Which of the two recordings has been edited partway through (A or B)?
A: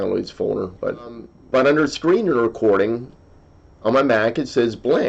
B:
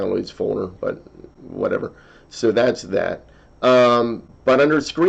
A